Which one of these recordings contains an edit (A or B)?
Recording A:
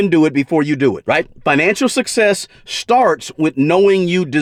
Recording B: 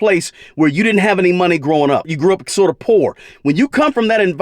B